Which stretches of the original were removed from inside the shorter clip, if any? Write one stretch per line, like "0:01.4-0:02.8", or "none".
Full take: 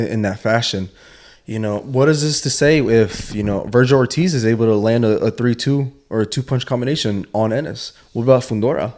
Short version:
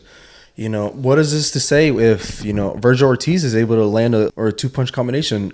0:05.2-0:06.0